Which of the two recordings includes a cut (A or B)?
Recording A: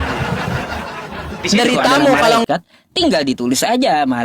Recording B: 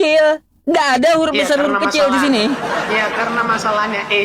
A